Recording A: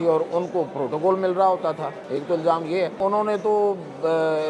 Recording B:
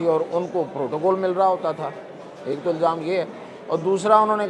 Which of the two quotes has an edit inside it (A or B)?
A